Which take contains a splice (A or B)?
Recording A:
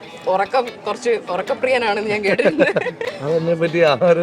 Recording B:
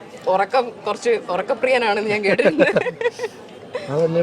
A